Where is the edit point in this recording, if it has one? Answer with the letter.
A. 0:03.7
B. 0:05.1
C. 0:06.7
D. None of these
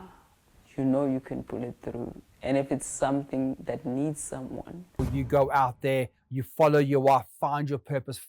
B